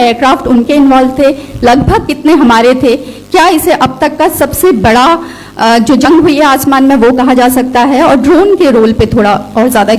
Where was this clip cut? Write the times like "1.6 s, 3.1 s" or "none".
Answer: none